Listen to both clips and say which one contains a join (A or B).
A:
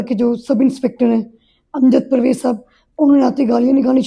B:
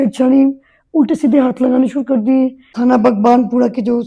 B